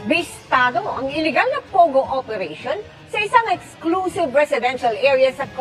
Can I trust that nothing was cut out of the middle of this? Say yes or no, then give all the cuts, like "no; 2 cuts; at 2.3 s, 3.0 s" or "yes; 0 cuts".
yes; 0 cuts